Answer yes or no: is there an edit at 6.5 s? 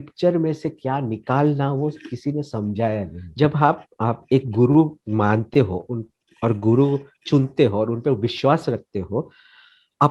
no